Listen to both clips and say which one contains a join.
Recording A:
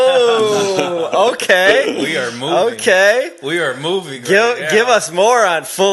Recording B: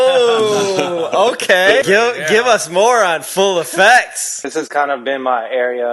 B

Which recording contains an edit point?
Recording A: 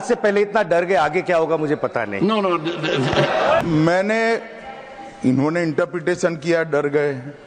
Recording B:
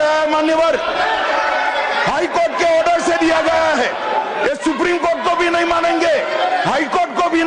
A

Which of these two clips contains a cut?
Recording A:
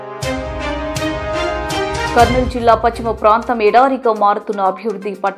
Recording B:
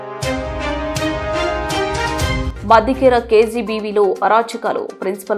B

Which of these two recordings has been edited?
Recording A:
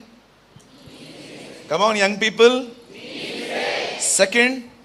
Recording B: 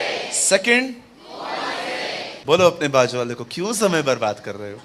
B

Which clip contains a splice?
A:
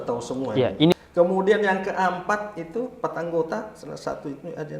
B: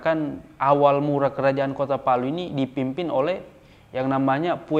A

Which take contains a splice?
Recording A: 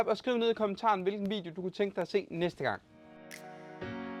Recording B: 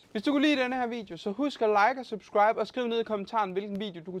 A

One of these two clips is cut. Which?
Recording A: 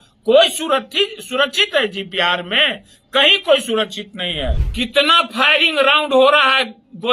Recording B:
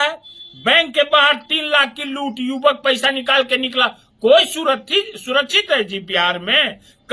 A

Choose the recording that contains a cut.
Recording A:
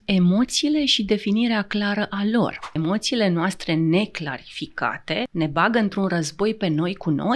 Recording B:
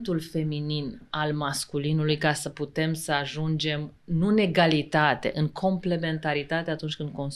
A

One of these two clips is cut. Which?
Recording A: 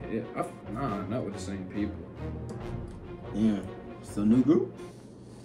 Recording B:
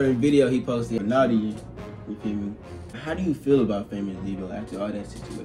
B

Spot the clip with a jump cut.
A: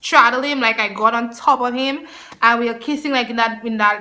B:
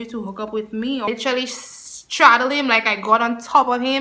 B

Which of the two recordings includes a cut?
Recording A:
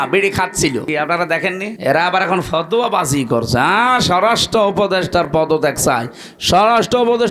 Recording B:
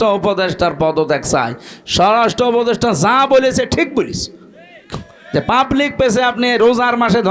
A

